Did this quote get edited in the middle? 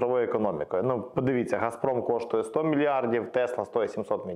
no; 0 cuts

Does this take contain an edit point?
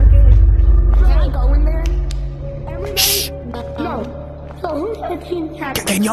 no; 0 cuts

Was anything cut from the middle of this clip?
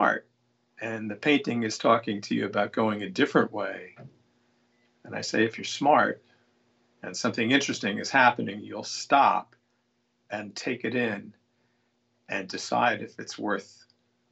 no; 0 cuts

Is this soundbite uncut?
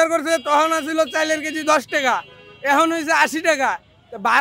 yes; 0 cuts

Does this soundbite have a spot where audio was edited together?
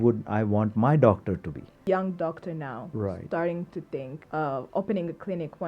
yes; 2 cuts; at 1.7 s, 4.2 s

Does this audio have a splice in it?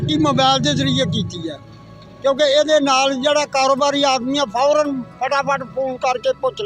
no; 0 cuts

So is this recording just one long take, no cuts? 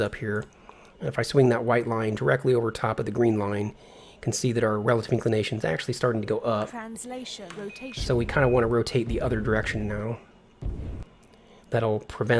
yes; 0 cuts

